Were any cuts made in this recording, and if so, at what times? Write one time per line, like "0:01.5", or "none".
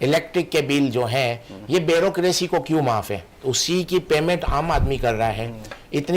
0:03.3